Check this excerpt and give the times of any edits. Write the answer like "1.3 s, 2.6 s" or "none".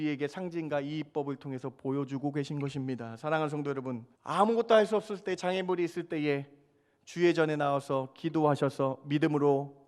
4.1 s